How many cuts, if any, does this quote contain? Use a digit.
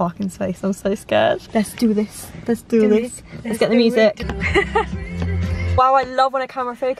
3